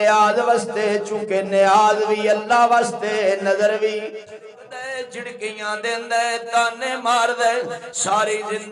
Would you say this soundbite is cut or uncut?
cut